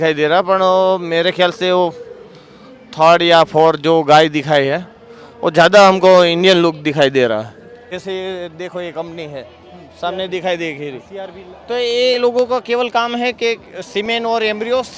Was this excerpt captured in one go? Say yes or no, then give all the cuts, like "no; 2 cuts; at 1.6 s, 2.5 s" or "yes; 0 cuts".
no; 1 cut; at 7.7 s